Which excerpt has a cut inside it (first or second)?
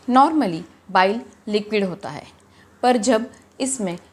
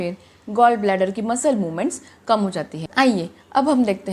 second